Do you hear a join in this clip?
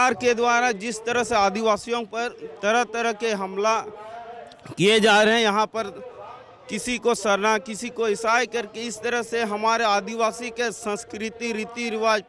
no; 0 cuts

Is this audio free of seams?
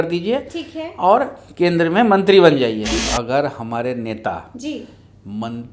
no; 1 cut; at 2.9 s

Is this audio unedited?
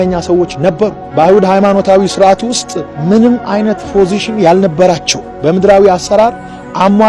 yes; 0 cuts

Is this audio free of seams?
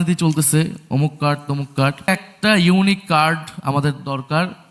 no; 1 cut; at 2.1 s

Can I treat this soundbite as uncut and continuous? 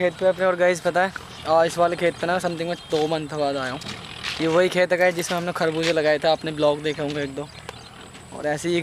yes; 0 cuts

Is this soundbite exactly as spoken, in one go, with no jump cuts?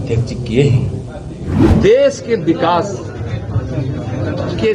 no; 1 cut; at 1.7 s

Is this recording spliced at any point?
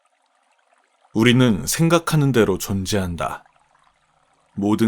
yes; 1 cut; at 1.1 s

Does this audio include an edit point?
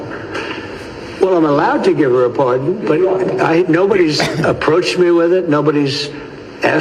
no; 0 cuts

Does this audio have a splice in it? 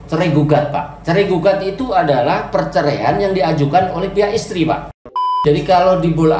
yes; 1 cut; at 5.3 s

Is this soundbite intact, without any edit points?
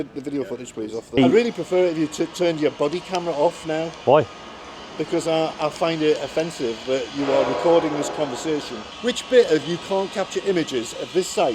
no; 2 cuts; at 1.2 s, 8.9 s

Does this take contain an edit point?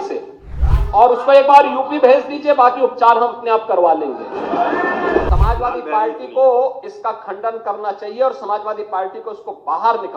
yes; 1 cut; at 5.3 s

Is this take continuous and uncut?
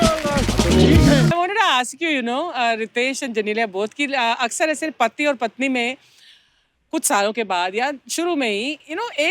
no; 1 cut; at 1.3 s

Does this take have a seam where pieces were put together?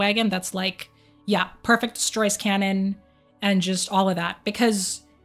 no; 0 cuts

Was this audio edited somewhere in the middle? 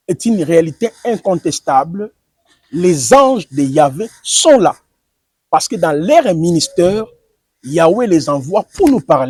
no; 0 cuts

